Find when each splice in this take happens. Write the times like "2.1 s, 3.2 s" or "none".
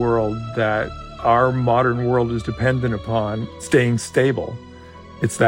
1.0 s, 3.5 s

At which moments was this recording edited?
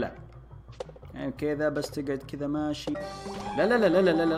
3.0 s

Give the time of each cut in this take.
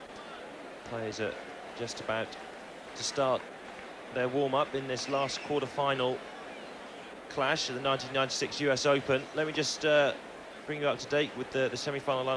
8.9 s

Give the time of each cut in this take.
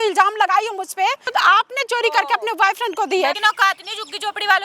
1.2 s, 3.4 s

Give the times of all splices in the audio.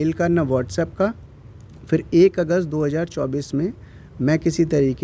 none

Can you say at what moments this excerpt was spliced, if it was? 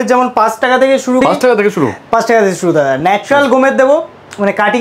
1.2 s

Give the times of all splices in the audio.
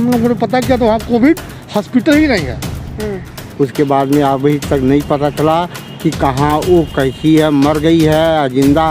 3.4 s

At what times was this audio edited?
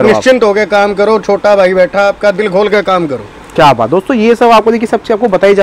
none

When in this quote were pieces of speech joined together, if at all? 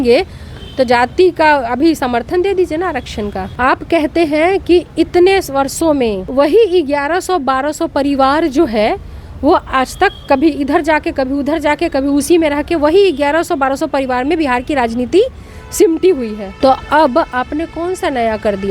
3.4 s, 6.2 s, 16.4 s

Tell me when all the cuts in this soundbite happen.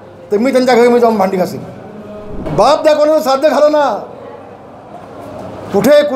2.4 s

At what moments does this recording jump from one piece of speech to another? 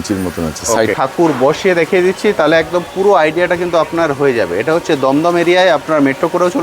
0.9 s

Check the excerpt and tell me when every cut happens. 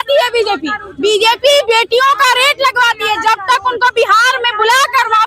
none

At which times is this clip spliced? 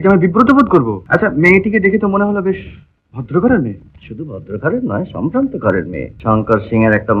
1.0 s, 6.1 s

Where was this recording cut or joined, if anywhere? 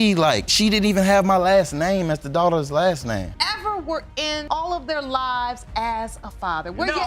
3.4 s

